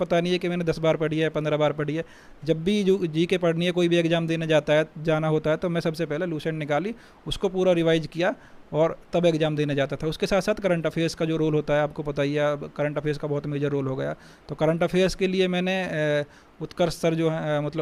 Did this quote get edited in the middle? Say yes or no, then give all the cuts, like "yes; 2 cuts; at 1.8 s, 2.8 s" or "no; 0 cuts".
no; 0 cuts